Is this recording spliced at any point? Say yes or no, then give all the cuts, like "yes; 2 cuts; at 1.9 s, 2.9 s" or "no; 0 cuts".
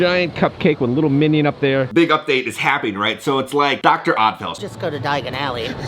yes; 2 cuts; at 1.9 s, 4.5 s